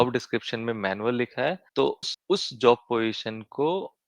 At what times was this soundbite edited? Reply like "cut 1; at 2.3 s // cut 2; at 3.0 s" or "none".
cut 1; at 1.9 s